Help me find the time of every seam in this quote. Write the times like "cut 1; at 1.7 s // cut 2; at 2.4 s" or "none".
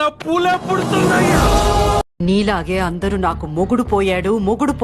cut 1; at 2.1 s